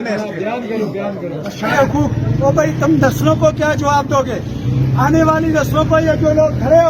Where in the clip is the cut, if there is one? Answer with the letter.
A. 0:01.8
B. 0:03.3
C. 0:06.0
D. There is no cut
A